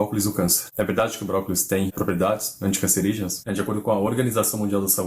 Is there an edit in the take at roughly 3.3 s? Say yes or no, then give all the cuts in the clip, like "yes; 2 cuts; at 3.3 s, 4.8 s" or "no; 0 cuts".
yes; 2 cuts; at 1.9 s, 3.3 s